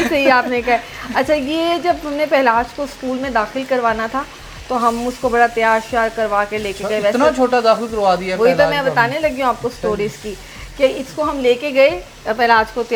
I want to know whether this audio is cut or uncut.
uncut